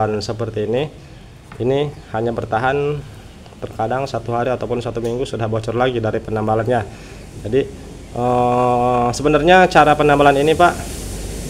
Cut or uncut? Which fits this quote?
uncut